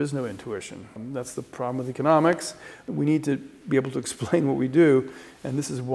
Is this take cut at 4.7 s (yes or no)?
no